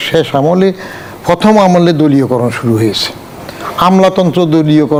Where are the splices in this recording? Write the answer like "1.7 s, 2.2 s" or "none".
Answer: none